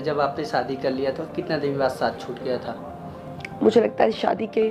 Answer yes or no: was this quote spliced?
no